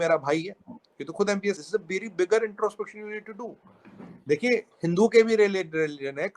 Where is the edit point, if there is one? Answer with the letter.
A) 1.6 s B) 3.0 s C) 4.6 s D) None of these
A